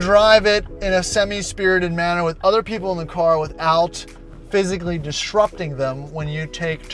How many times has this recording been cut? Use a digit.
0